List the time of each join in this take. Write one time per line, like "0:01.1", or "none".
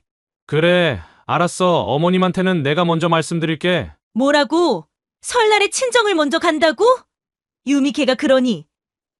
0:04.0